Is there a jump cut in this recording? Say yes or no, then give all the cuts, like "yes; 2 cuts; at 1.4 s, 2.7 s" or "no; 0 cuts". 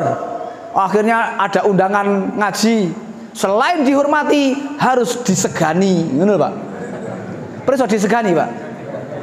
no; 0 cuts